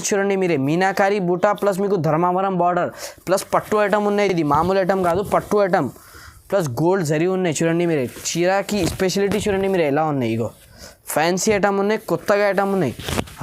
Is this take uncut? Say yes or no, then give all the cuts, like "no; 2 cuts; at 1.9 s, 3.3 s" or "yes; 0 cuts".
yes; 0 cuts